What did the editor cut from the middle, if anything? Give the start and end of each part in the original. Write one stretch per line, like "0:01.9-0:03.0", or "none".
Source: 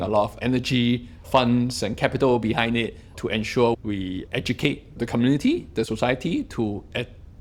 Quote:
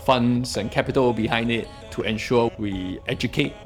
none